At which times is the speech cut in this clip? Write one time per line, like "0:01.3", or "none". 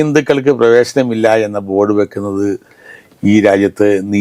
none